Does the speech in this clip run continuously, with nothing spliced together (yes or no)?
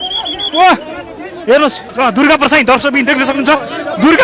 no